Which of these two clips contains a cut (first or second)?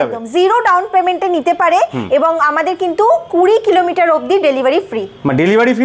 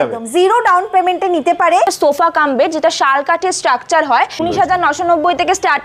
second